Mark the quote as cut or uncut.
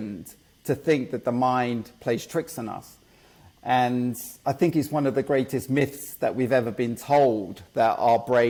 uncut